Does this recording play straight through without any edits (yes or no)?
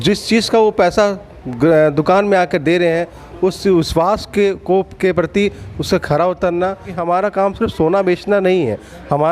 no